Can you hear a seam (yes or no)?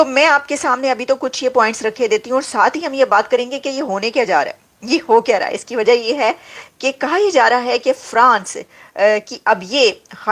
no